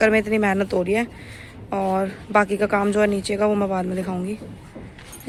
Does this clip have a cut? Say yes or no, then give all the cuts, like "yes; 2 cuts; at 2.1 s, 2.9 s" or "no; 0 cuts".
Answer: no; 0 cuts